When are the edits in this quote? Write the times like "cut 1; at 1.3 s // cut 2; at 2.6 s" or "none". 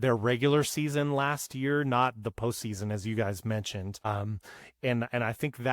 cut 1; at 4.1 s

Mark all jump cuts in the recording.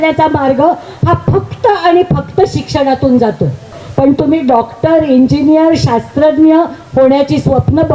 cut 1; at 3.8 s

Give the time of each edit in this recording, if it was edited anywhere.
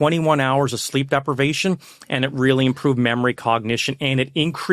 none

